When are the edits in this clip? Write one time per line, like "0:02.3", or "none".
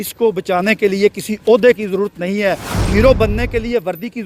none